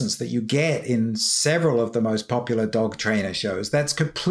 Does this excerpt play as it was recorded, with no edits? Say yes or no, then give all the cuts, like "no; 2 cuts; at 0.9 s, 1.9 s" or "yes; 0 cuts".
yes; 0 cuts